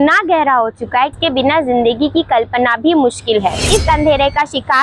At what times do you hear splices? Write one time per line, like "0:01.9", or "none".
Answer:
0:01.1
0:03.7